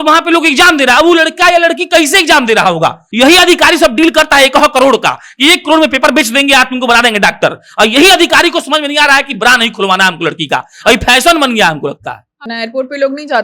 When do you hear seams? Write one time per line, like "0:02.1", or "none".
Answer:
0:03.0
0:12.4